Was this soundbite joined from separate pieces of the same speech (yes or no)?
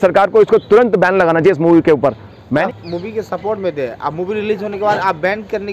yes